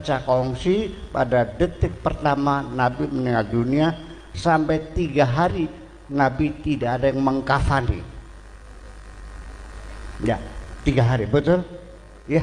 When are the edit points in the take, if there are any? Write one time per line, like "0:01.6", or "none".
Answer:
none